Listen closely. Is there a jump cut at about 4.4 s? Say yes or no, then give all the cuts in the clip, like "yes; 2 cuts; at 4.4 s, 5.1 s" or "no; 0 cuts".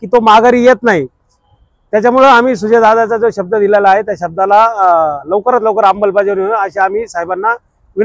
no; 0 cuts